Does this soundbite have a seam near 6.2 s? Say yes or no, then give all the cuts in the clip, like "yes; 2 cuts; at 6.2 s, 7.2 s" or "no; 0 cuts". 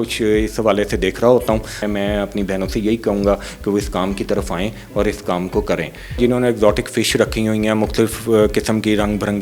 yes; 2 cuts; at 1.8 s, 6.2 s